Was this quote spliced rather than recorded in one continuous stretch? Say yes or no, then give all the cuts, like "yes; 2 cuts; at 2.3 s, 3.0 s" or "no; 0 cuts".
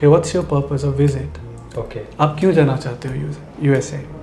no; 0 cuts